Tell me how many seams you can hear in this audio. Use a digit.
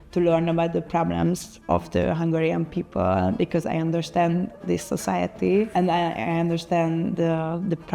2